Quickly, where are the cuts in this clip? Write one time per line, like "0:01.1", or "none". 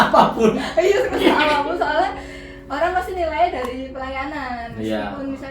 none